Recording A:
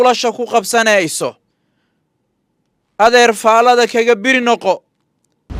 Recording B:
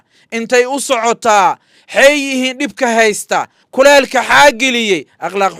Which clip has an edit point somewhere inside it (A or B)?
B